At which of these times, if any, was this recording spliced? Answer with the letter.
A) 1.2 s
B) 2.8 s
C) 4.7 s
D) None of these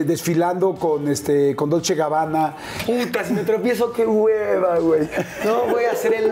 B